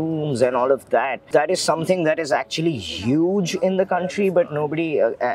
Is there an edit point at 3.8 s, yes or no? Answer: no